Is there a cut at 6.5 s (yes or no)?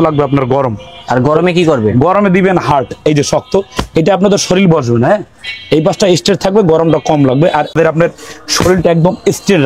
no